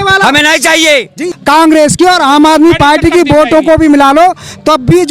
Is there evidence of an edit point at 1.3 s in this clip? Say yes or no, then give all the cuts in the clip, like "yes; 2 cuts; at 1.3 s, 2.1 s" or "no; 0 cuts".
yes; 1 cut; at 1.3 s